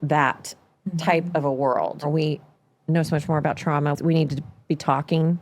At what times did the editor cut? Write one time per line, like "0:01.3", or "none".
0:02.1
0:03.9